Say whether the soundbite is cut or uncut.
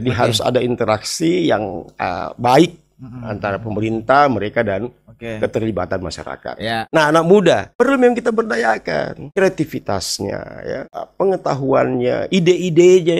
cut